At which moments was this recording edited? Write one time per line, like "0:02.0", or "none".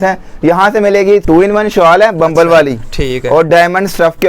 0:01.2